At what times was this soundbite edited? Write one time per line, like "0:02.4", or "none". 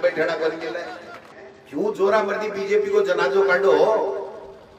0:01.3